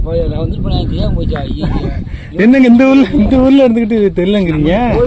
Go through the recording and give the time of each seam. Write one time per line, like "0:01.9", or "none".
none